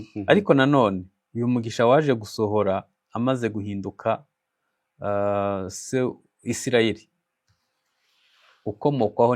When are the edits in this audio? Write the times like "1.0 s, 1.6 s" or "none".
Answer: none